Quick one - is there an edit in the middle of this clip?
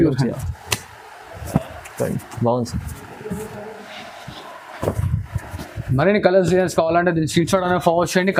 no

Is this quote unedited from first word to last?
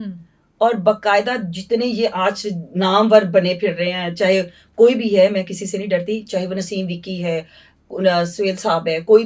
yes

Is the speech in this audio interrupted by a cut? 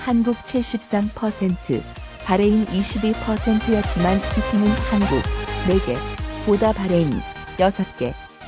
no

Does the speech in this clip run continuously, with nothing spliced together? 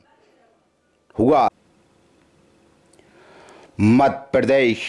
no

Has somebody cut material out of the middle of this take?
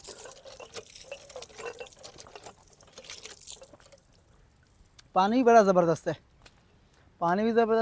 no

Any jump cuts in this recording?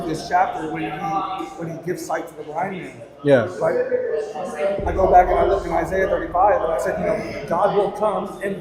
no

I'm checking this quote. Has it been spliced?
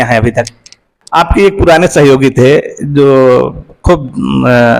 yes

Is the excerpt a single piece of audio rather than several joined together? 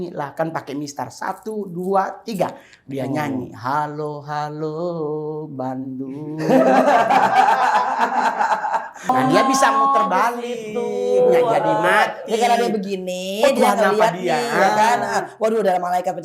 no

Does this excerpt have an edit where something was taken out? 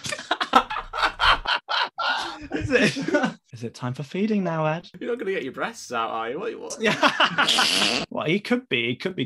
yes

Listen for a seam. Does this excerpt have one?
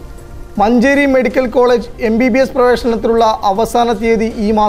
no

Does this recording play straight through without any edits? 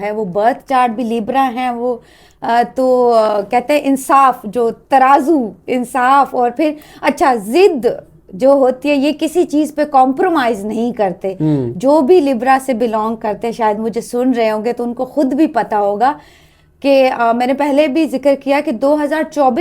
yes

